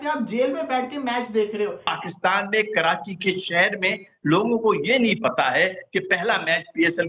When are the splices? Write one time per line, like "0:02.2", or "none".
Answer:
0:01.9